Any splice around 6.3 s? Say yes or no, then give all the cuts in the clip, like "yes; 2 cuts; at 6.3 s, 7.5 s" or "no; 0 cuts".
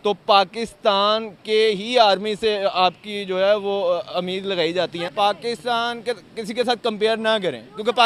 no; 1 cut; at 5.1 s